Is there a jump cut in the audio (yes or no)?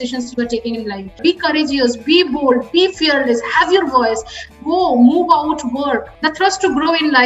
yes